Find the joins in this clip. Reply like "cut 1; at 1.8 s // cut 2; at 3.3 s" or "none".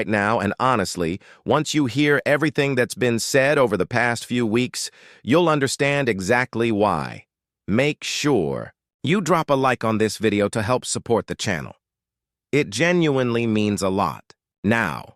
none